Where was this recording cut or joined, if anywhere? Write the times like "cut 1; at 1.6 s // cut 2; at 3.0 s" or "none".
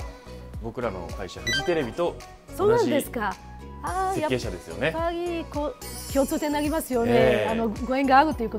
none